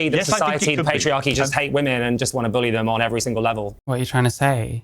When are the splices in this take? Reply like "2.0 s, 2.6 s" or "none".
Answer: 3.8 s